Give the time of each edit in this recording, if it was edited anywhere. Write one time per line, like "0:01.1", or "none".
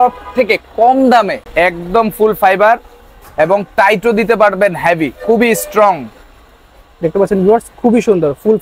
0:01.4